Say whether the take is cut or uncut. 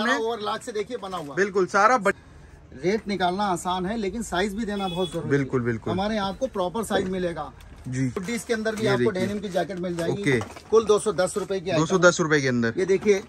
cut